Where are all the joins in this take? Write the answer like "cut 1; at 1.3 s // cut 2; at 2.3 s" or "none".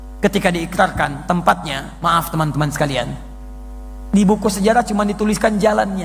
none